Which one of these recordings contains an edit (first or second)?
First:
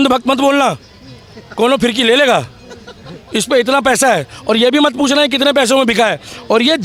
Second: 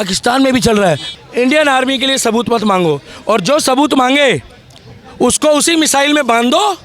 second